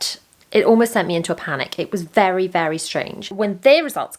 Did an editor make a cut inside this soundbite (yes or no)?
yes